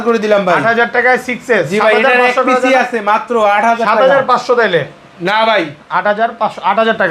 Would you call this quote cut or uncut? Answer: uncut